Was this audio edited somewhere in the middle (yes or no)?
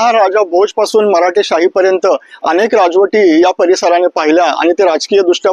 no